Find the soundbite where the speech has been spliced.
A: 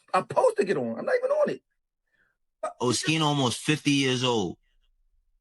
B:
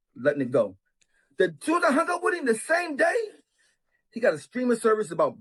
A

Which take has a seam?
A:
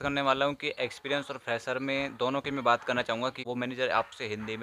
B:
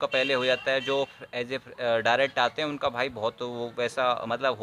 A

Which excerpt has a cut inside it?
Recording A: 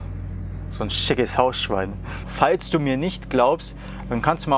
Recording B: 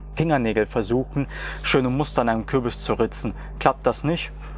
A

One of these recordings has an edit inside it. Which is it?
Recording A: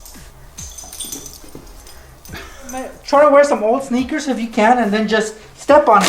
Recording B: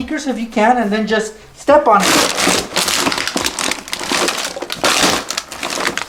A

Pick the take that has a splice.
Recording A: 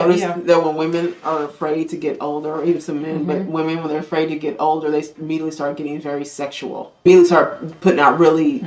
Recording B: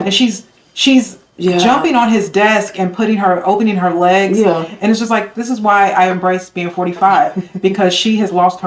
A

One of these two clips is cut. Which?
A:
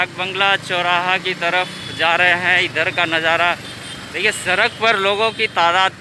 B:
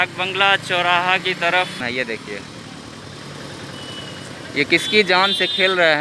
B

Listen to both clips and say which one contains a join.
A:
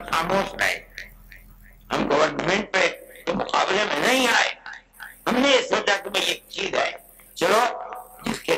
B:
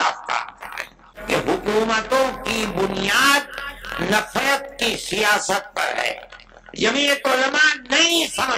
B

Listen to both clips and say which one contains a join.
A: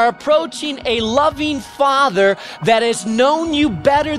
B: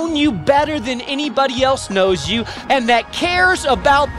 B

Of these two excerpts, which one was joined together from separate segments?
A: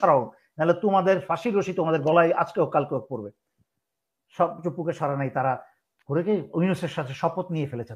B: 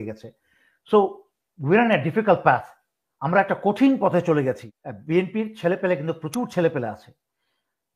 B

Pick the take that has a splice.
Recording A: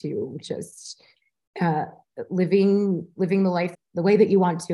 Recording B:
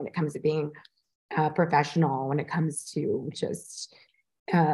A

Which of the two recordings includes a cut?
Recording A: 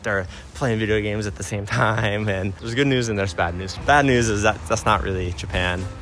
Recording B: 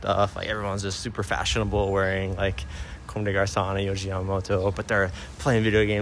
A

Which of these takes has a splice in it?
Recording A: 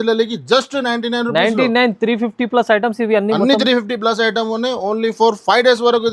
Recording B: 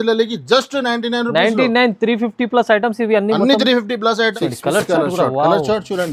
B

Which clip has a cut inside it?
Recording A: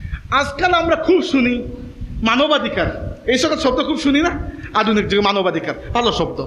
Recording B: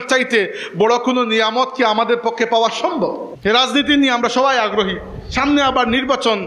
B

